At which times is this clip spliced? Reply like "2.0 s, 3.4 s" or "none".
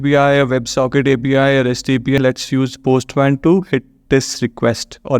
2.2 s